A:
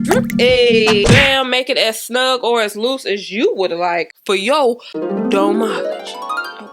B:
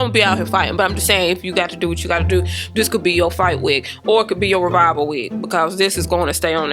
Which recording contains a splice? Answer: A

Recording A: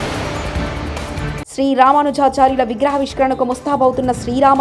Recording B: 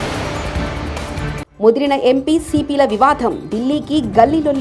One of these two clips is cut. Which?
B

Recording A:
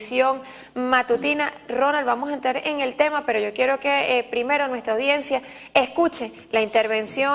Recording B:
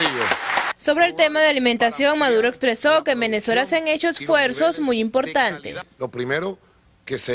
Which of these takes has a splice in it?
A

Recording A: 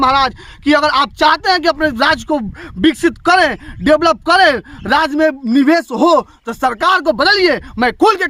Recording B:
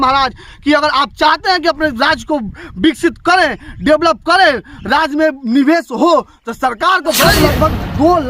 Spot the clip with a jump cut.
B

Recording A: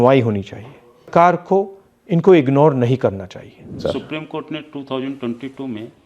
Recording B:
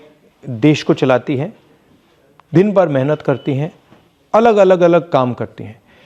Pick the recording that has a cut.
A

